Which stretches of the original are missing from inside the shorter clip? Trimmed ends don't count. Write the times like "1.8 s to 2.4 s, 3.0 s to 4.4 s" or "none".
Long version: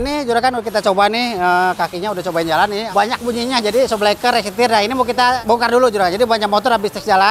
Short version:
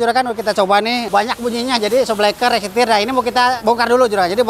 1.3 s to 2.9 s